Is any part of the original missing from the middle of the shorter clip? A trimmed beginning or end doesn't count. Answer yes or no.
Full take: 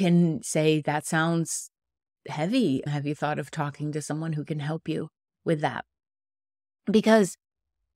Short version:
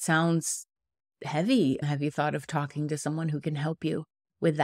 no